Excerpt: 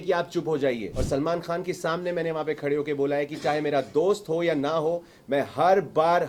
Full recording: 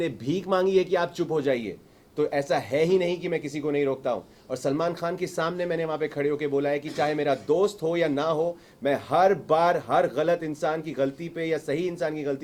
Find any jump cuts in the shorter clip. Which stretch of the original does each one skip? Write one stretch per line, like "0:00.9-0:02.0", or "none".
0:01.8-0:04.5